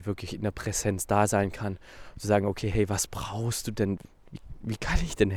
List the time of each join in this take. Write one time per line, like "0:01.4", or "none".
0:04.0